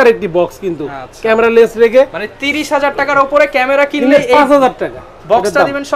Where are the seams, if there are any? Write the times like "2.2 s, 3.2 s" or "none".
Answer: none